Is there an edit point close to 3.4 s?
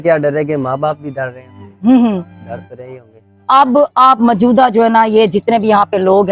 yes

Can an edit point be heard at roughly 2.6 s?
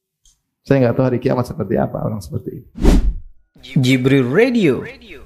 yes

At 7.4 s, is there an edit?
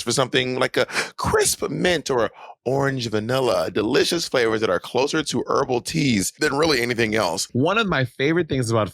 yes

